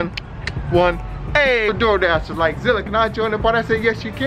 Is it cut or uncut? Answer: cut